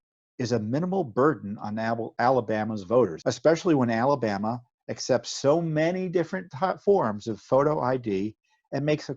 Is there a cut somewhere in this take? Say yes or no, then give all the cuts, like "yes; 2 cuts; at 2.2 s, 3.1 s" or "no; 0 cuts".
yes; 1 cut; at 3.2 s